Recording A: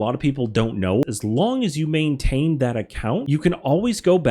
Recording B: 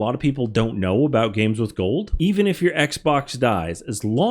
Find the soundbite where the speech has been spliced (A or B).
A